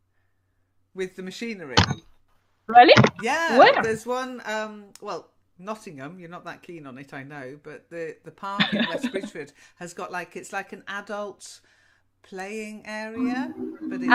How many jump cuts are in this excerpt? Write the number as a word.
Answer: zero